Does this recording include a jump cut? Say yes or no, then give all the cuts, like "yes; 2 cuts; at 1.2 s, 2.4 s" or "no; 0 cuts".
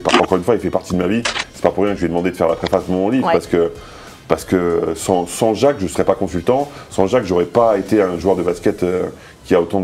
no; 0 cuts